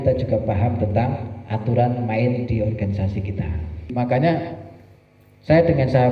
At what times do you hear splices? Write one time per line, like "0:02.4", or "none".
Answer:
0:03.9